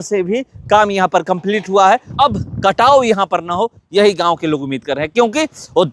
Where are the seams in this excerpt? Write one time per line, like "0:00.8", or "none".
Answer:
0:02.1